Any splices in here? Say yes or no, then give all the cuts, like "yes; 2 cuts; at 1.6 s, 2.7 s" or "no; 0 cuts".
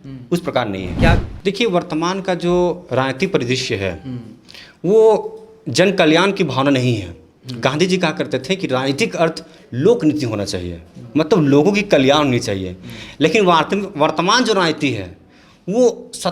yes; 1 cut; at 1.3 s